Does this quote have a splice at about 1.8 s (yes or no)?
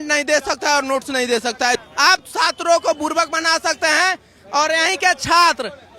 yes